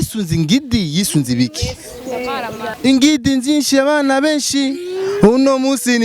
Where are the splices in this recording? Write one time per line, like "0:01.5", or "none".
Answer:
0:02.6